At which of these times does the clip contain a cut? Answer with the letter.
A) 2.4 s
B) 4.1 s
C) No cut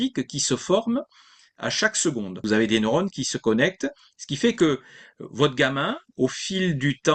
A